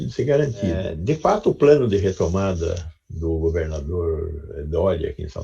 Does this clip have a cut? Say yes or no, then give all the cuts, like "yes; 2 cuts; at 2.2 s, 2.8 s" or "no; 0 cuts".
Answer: yes; 1 cut; at 0.9 s